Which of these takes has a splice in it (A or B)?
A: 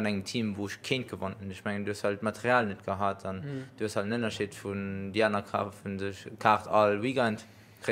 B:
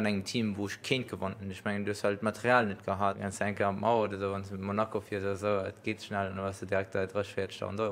B